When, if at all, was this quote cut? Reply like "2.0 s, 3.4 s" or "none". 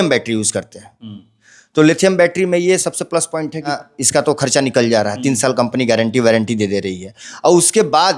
3.7 s